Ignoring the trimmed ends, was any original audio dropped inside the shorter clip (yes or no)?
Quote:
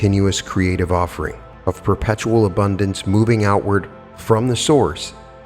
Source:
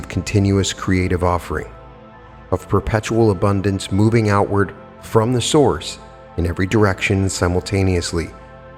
yes